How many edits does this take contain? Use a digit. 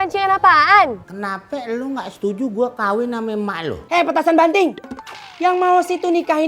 2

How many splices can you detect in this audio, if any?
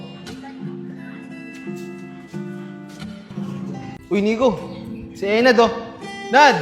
1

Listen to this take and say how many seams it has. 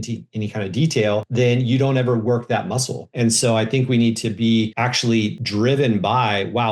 3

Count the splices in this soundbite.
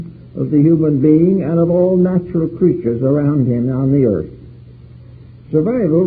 1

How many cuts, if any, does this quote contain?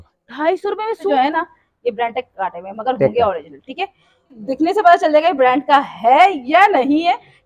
2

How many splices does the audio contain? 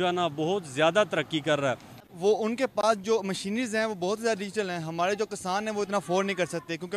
1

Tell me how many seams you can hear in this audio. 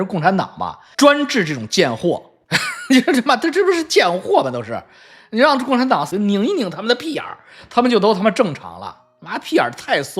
1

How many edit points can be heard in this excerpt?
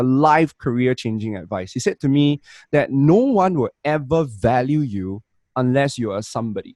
0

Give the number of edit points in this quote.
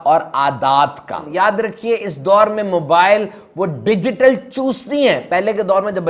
1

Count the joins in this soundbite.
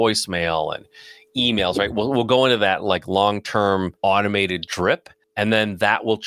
2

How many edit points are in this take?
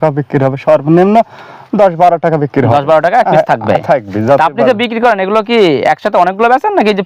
0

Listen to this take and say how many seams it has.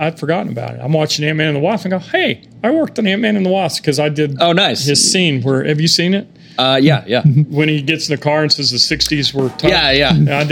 0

